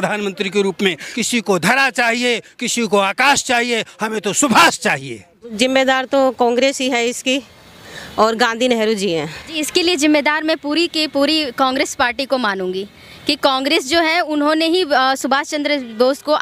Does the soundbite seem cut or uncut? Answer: cut